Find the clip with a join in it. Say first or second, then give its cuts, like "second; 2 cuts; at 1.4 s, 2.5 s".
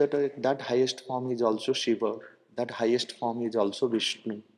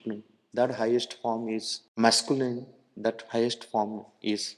second; 1 cut; at 1.8 s